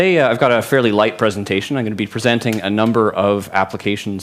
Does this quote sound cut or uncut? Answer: cut